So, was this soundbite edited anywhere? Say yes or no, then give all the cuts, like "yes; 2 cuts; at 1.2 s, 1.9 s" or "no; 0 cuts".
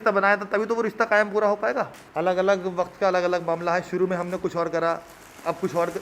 yes; 1 cut; at 2.0 s